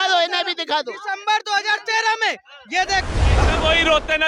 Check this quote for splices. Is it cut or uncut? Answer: cut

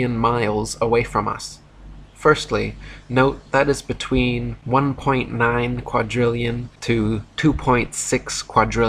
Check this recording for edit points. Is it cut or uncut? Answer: cut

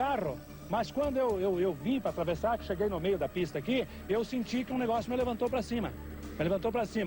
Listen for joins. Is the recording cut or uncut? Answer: uncut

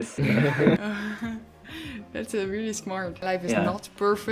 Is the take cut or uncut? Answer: cut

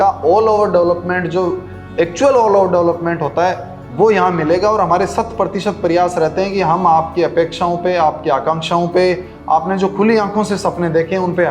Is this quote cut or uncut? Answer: uncut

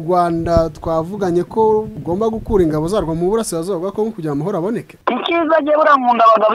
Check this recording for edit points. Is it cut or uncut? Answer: cut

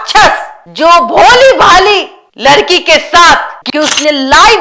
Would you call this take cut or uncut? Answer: cut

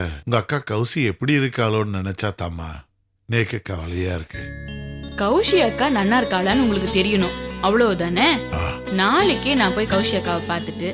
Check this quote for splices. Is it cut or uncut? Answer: uncut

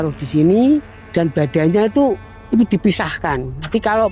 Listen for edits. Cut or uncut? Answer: cut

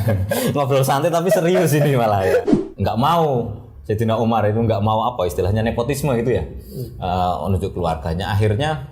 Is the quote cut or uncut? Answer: cut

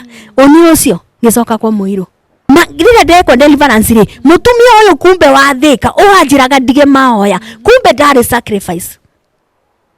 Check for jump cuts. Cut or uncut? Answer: cut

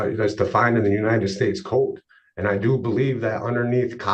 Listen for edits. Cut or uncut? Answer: uncut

